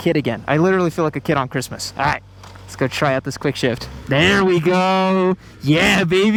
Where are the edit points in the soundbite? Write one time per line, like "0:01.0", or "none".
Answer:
none